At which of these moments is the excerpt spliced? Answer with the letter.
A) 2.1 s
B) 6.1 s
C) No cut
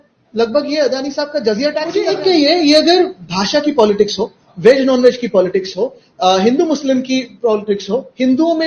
A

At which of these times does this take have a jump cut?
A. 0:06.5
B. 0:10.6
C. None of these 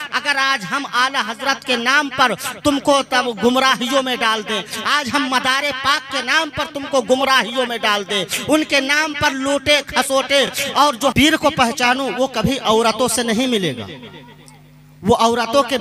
B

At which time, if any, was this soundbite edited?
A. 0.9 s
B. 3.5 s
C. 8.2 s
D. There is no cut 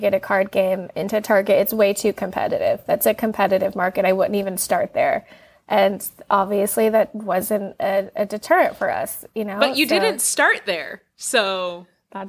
D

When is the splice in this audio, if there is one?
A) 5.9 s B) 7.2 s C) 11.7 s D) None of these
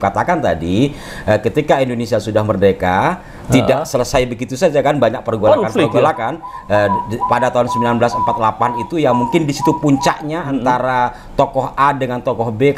D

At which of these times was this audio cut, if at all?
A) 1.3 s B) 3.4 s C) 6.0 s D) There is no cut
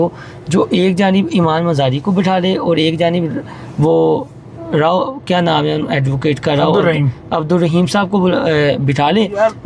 D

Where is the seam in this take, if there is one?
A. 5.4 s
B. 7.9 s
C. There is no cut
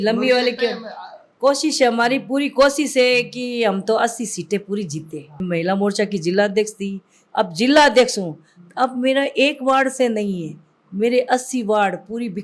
A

